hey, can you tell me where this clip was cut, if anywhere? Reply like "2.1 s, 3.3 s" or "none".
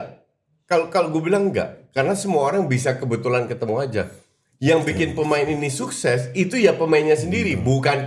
none

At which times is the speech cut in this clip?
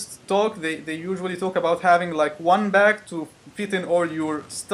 1.4 s

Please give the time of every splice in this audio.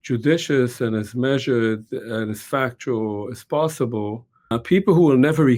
4.6 s

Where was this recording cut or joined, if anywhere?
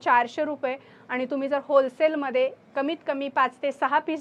none

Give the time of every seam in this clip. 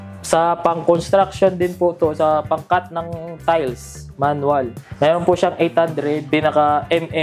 4.8 s, 6.2 s

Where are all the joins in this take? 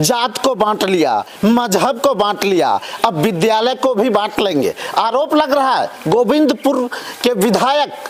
none

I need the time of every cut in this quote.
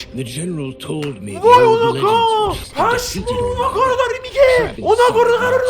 2.6 s, 4.7 s

